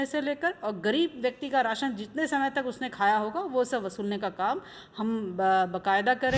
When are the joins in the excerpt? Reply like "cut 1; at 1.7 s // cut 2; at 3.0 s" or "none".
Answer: none